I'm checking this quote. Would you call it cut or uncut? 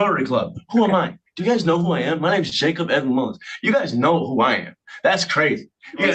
uncut